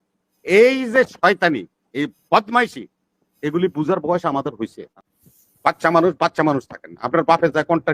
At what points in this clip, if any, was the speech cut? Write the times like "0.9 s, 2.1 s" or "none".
4.9 s